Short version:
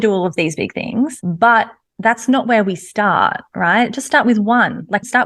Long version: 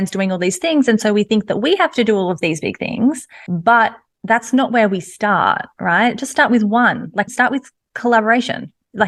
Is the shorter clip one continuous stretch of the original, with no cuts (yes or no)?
no